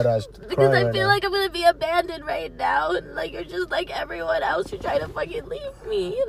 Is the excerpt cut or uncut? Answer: uncut